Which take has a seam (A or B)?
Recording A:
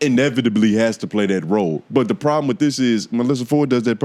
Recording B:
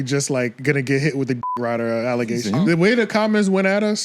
B